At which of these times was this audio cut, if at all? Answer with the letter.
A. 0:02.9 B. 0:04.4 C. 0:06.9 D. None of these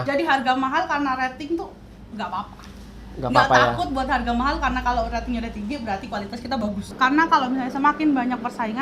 C